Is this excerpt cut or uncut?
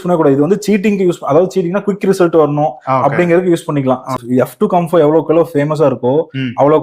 cut